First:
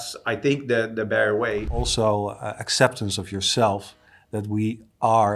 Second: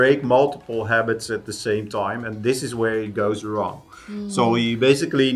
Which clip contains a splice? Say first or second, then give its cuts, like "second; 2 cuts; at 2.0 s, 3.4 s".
first; 1 cut; at 1.7 s